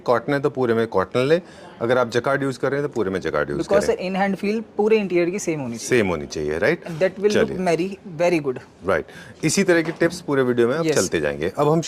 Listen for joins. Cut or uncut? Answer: uncut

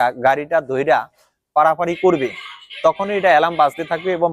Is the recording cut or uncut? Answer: uncut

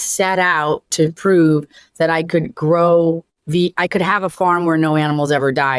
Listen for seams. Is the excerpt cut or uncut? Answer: cut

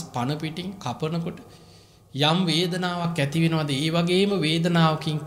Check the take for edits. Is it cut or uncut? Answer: uncut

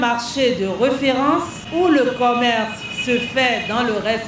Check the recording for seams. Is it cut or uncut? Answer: cut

